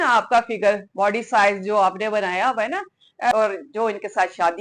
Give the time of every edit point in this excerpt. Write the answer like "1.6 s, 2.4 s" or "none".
3.3 s